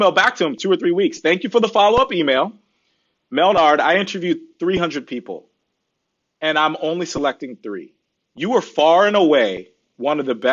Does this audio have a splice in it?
no; 0 cuts

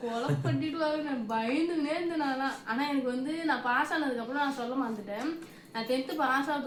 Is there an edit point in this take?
no; 0 cuts

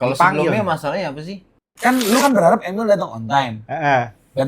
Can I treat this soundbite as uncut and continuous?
no; 1 cut; at 1.7 s

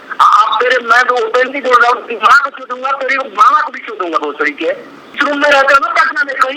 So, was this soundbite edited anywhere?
yes; 1 cut; at 5.1 s

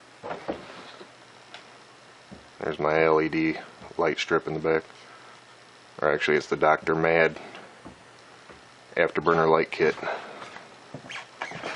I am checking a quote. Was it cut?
no; 0 cuts

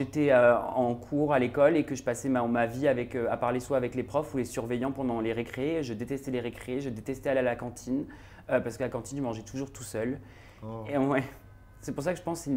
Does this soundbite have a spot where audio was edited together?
no; 0 cuts

